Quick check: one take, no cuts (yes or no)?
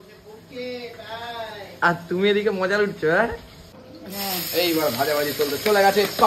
no